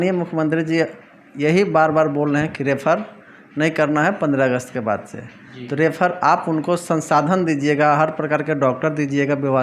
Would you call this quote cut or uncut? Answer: uncut